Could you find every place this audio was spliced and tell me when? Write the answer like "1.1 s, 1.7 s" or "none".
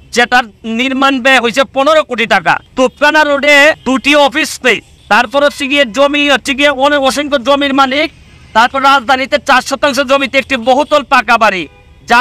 2.7 s, 3.8 s, 4.9 s